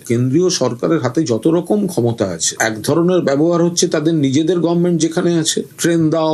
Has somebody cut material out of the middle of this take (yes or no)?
no